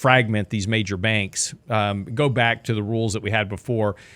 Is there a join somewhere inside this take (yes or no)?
no